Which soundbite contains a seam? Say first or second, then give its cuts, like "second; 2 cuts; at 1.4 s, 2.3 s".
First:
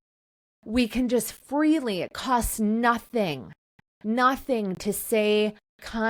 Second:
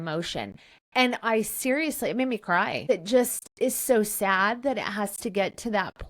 second; 1 cut; at 2.8 s